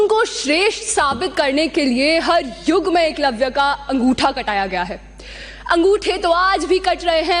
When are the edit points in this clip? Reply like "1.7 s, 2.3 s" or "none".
none